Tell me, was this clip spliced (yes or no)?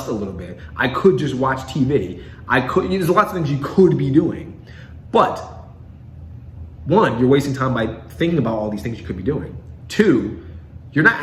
no